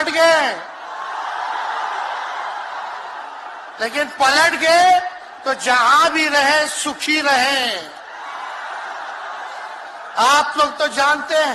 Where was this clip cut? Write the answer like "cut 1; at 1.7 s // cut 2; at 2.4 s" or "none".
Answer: none

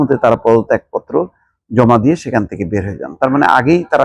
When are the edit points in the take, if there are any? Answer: none

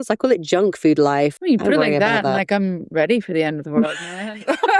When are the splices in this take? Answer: cut 1; at 1.4 s

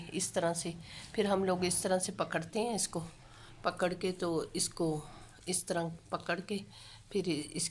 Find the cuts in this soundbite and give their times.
none

